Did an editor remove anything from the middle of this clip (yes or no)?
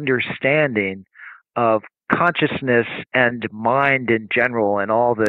yes